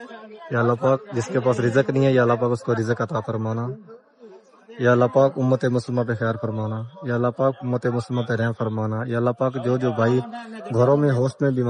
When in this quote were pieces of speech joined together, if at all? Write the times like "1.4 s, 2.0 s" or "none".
none